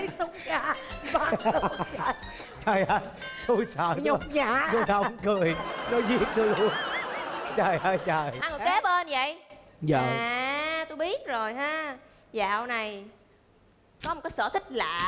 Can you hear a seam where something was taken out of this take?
yes; 1 cut; at 8.4 s

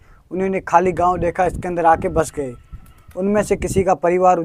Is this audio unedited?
yes; 0 cuts

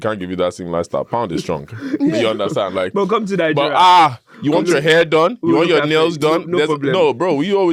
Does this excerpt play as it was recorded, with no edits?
yes; 0 cuts

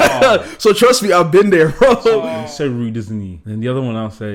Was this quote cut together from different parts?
yes; 2 cuts; at 2.3 s, 3.4 s

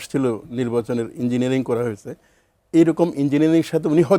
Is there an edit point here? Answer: no; 0 cuts

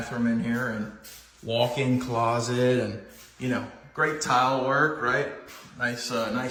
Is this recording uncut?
yes; 0 cuts

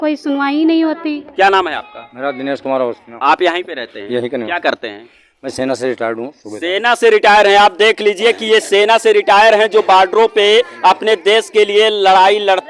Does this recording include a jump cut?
no; 0 cuts

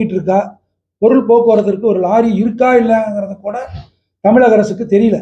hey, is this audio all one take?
yes; 0 cuts

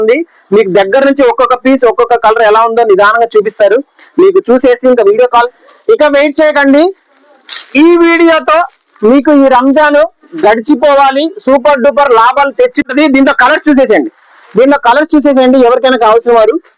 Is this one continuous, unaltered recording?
no; 2 cuts; at 5.6 s, 12.9 s

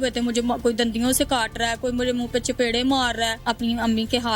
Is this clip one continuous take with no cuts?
no; 1 cut; at 3.4 s

